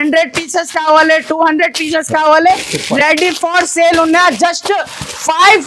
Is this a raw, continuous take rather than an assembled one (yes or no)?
yes